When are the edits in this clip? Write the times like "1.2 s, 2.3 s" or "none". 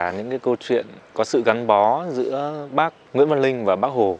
1.0 s, 3.0 s

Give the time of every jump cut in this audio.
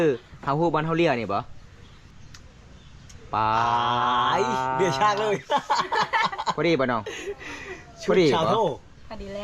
2.0 s

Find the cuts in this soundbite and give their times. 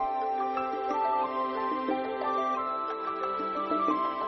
2.1 s

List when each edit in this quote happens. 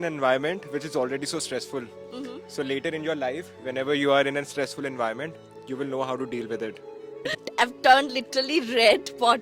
7.4 s

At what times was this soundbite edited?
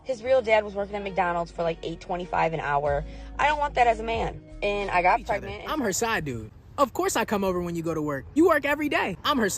5.5 s

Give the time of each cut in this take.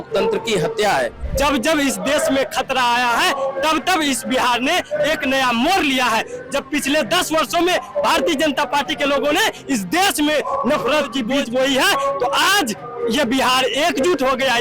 1.2 s, 11.4 s

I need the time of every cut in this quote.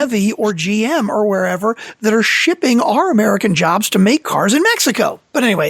none

